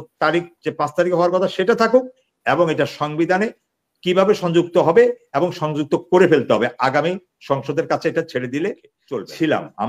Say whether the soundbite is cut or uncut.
cut